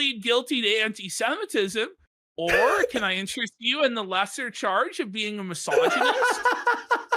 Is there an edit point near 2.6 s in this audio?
no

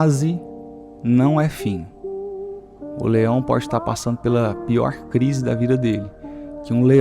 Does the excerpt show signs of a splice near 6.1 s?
no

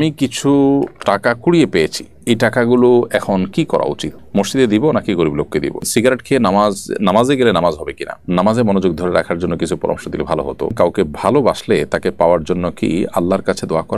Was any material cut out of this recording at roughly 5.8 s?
yes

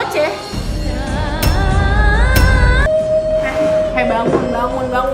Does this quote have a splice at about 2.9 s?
yes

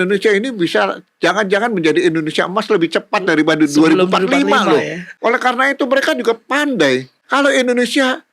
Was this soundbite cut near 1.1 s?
no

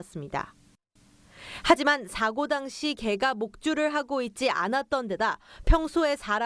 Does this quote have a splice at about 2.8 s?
no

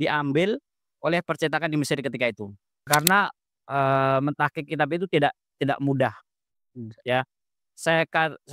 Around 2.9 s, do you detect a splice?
yes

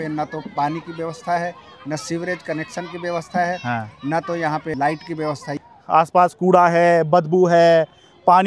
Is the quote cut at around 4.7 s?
yes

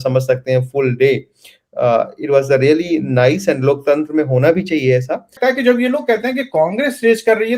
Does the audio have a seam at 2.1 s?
no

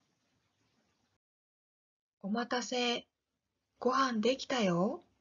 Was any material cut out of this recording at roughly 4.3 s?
yes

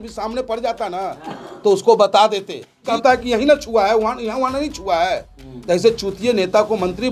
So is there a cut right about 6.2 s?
no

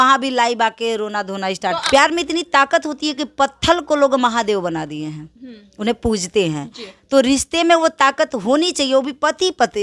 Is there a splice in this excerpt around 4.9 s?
no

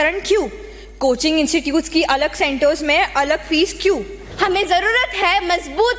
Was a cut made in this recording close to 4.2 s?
yes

